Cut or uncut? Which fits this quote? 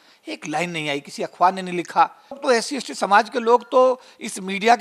cut